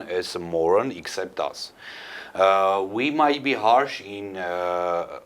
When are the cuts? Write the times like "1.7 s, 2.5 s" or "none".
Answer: none